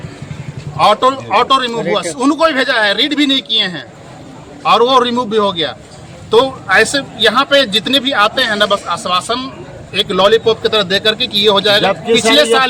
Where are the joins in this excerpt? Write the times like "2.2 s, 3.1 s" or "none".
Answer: none